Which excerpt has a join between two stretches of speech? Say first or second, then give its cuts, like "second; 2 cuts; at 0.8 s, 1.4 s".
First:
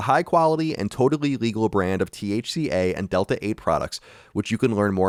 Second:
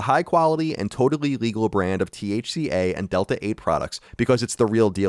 second; 1 cut; at 4.0 s